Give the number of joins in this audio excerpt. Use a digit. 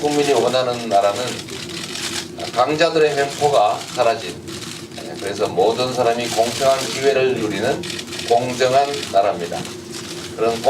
1